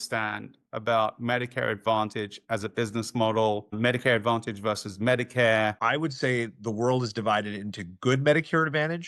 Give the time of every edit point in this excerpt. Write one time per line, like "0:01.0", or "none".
0:05.8